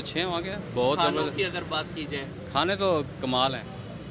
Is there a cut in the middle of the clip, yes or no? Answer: no